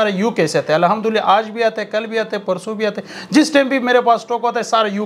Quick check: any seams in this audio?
no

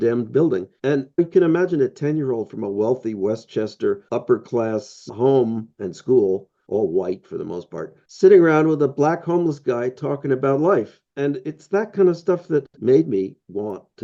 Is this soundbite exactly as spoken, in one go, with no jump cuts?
yes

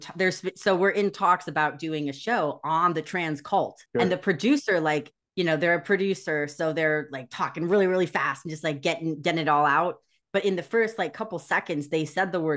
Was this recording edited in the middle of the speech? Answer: yes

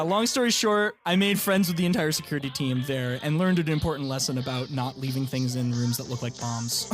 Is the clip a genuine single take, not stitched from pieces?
no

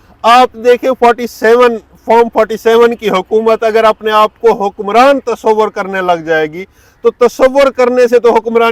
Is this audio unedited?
yes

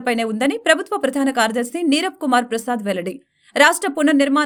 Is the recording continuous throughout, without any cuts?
yes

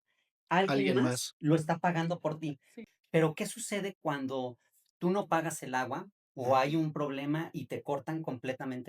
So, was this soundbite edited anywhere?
yes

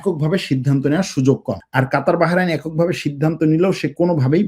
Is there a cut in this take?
yes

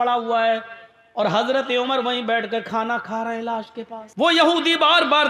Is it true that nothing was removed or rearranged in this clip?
no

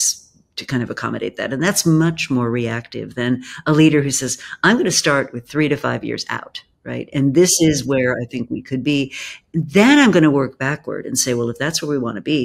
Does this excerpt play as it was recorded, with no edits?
yes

